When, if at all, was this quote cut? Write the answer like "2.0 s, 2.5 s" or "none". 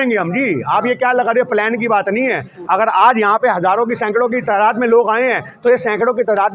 none